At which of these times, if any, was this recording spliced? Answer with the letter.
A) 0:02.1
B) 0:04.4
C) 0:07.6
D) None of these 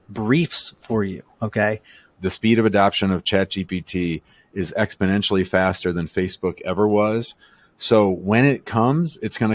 A